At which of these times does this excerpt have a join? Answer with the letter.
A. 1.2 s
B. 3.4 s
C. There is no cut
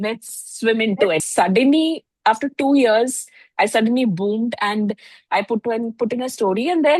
A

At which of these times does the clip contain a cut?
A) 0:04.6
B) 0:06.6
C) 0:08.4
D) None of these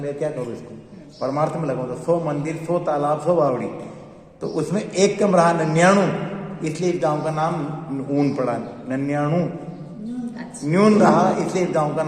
D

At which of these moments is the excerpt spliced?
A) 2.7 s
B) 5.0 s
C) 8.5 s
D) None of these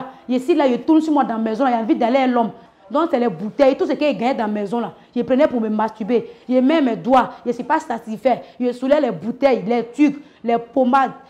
A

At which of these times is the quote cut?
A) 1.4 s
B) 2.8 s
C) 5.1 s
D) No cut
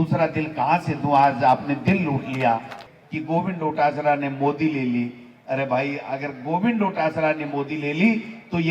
B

